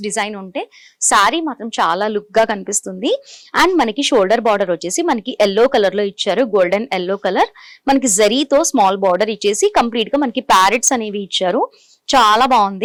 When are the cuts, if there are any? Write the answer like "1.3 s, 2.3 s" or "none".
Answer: none